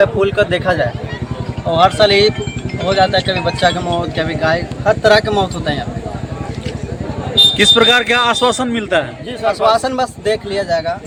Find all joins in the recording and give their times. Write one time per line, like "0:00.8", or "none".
none